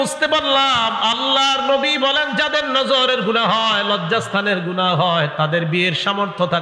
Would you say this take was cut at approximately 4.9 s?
no; 0 cuts

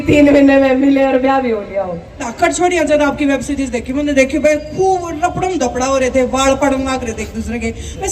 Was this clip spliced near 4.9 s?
no; 1 cut; at 2.2 s

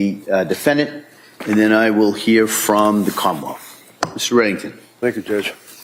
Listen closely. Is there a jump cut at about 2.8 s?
no; 0 cuts

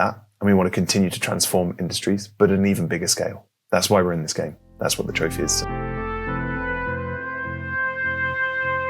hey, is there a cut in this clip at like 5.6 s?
yes; 1 cut; at 5.6 s

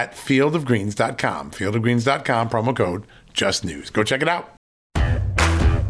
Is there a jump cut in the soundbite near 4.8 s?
yes; 1 cut; at 4.8 s

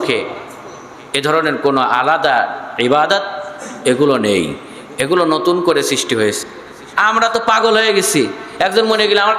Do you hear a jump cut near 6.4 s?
yes; 1 cut; at 6.4 s

